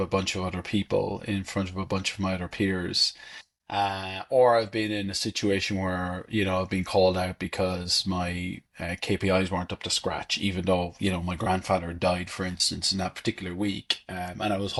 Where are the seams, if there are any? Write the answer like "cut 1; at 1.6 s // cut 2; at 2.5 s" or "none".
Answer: none